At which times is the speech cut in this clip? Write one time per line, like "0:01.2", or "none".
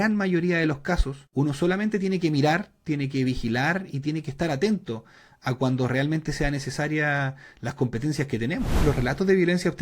0:01.2
0:08.8